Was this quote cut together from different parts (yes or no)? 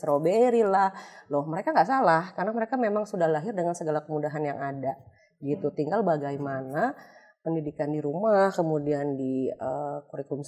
no